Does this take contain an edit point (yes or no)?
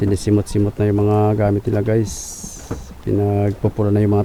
no